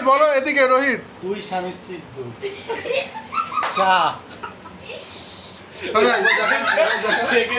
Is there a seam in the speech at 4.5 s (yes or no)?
yes